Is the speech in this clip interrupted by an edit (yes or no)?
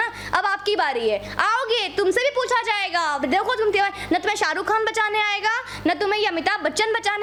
no